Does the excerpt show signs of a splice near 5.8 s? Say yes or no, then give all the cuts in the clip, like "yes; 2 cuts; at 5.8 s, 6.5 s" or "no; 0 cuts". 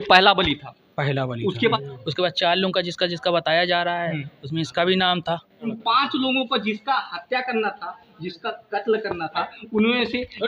yes; 2 cuts; at 1.7 s, 5.8 s